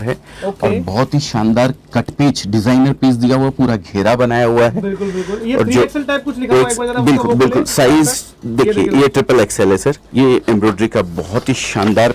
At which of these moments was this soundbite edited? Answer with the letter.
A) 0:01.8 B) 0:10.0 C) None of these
B